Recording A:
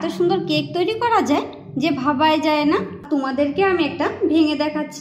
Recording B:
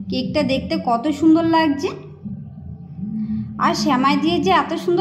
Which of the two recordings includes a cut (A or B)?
A